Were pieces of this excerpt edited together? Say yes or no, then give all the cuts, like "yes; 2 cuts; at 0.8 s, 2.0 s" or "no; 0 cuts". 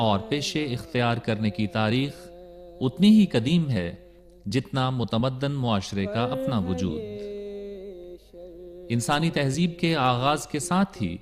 no; 0 cuts